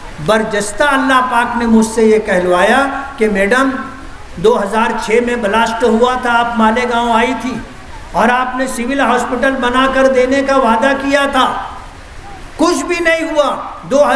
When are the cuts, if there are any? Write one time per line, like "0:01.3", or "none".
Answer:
none